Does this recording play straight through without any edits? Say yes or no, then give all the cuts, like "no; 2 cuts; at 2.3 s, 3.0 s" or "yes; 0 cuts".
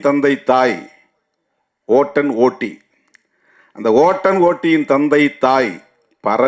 yes; 0 cuts